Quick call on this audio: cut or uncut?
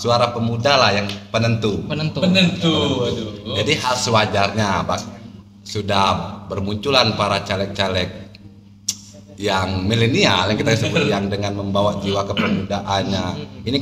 uncut